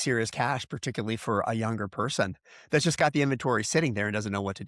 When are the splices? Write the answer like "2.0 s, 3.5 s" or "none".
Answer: none